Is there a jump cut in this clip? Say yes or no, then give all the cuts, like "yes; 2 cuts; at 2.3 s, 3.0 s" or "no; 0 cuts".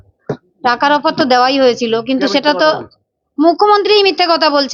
no; 0 cuts